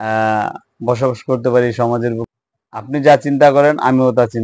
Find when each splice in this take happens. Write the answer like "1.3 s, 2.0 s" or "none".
2.2 s

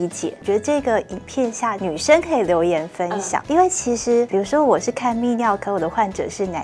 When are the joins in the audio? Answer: 1.7 s, 3.4 s, 4.3 s

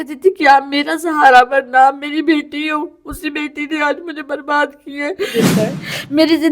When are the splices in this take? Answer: 5.5 s

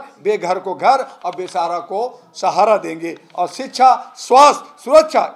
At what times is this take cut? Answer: none

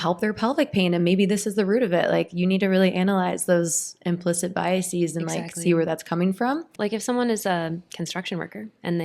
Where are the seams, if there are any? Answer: 6.7 s

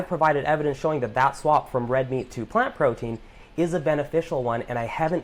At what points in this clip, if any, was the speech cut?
none

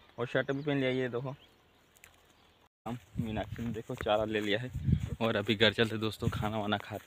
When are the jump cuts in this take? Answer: 2.7 s

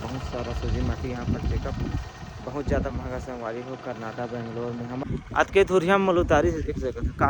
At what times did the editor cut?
5.1 s

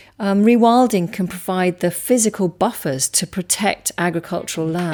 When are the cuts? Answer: none

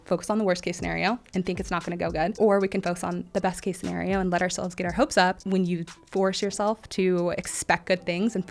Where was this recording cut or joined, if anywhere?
2.3 s, 5.4 s

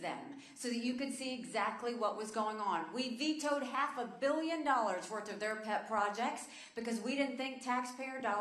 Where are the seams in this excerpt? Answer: 4.0 s

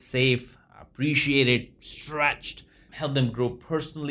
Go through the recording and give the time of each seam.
2.9 s

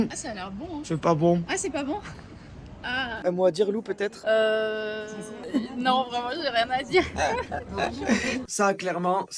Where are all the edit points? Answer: 3.1 s, 8.4 s

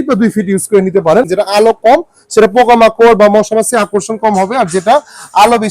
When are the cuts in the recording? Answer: 1.3 s

